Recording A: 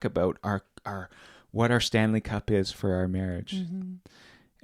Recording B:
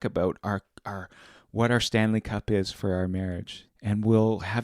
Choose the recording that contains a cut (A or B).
B